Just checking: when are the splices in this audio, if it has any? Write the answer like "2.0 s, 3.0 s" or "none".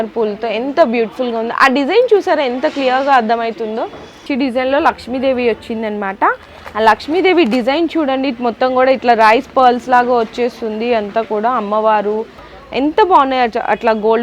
4.2 s, 12.4 s